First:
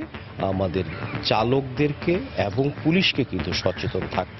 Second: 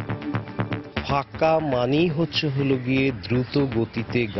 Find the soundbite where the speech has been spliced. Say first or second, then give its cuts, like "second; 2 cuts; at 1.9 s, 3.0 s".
second; 1 cut; at 0.9 s